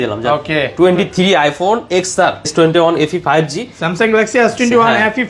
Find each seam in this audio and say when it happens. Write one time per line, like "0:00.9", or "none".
0:02.5